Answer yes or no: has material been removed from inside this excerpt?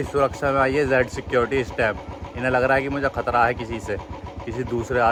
no